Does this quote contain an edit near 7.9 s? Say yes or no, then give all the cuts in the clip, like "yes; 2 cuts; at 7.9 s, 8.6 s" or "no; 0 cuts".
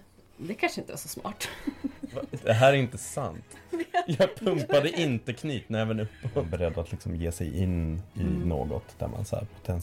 no; 2 cuts; at 2.2 s, 6.5 s